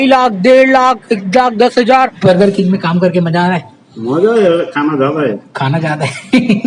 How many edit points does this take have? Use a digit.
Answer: 1